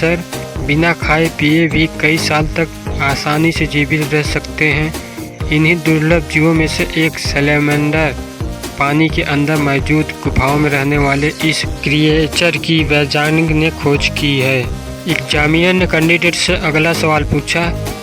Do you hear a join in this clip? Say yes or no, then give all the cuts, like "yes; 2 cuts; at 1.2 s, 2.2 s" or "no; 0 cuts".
no; 0 cuts